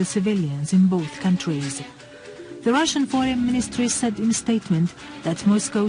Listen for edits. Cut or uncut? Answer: uncut